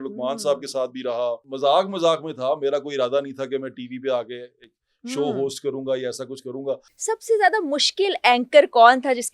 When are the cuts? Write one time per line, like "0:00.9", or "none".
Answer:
0:01.5
0:06.9